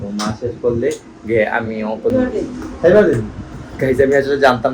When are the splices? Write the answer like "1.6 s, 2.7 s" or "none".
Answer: 2.1 s